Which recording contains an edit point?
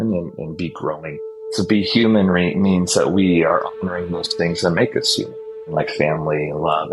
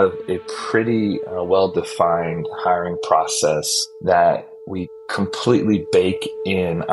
first; 2 cuts; at 1.5 s, 5.6 s

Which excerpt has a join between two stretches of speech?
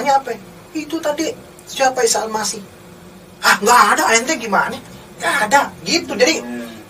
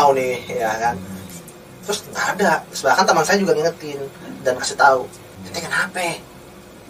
second; 1 cut; at 5.4 s

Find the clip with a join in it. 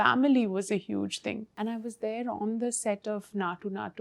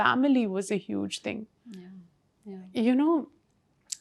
first; 1 cut; at 1.5 s

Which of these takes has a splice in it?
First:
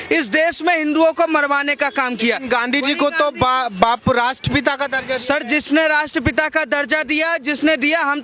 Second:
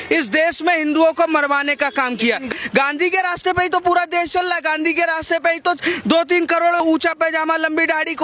second; 2 cuts; at 2.4 s, 6.8 s

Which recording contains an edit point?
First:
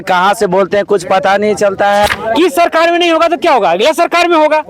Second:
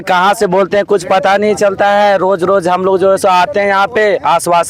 first; 1 cut; at 2.1 s

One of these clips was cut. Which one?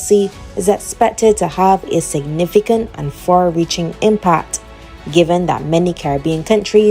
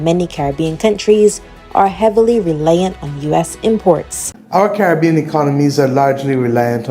second; 1 cut; at 4.4 s

